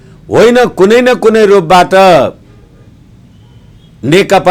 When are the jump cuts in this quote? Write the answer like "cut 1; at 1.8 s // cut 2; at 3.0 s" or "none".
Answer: none